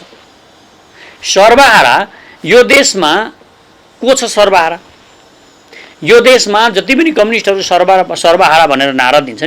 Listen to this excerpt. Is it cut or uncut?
uncut